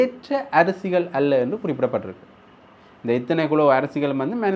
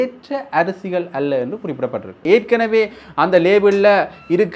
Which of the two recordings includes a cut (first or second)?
second